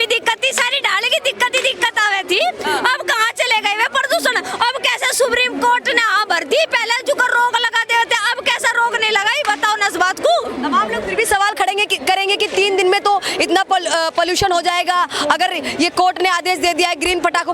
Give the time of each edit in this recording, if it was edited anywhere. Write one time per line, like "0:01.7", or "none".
none

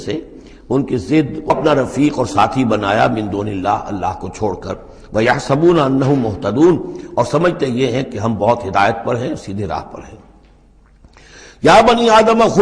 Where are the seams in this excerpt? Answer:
0:01.5

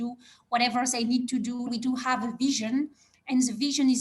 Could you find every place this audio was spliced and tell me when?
0:01.7

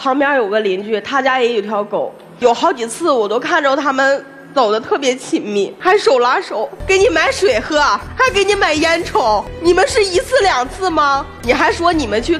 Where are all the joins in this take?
0:05.7
0:06.7
0:08.1
0:09.5
0:11.3

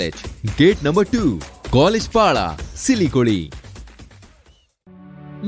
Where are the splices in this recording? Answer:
none

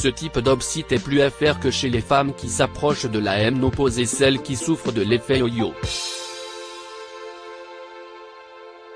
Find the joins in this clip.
0:06.1

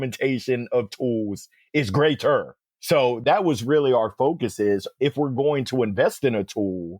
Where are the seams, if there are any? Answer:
0:02.7

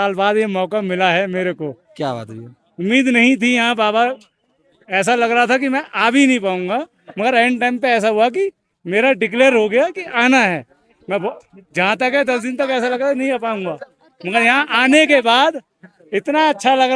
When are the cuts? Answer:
none

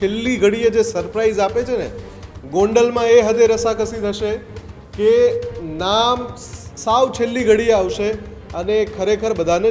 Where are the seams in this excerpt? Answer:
none

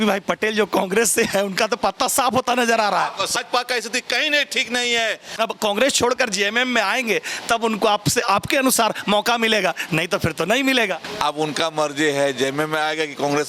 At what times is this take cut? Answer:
0:03.4
0:05.3
0:11.1

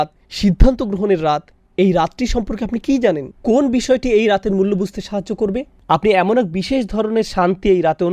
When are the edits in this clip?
0:05.8

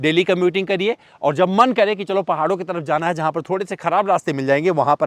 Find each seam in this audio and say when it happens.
none

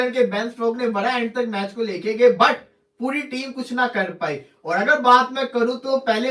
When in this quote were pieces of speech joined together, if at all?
0:04.4

